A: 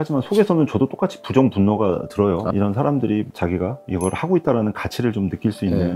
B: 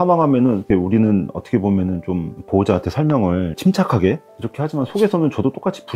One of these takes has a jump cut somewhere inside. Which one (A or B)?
A